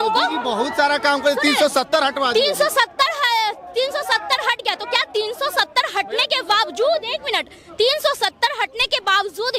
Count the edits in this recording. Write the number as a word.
zero